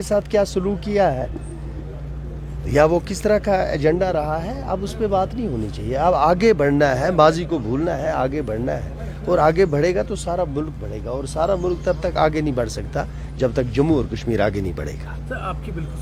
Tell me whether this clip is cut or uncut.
uncut